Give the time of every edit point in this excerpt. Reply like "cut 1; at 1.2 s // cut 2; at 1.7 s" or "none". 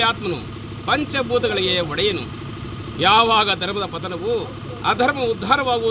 none